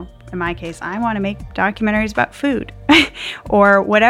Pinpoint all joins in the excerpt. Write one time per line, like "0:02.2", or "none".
0:01.4